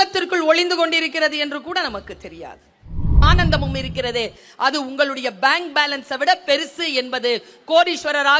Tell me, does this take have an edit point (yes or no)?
yes